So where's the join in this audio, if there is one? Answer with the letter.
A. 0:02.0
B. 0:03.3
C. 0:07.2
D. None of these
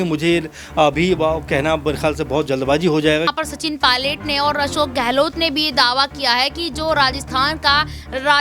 B